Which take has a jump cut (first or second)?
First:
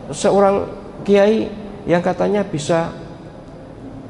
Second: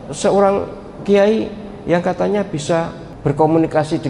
second